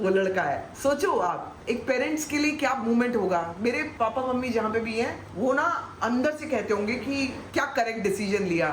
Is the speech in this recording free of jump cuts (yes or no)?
yes